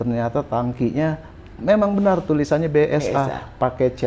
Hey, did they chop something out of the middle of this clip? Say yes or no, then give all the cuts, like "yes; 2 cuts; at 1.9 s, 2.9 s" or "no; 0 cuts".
no; 0 cuts